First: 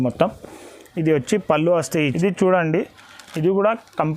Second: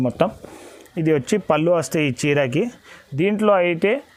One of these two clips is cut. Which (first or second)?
first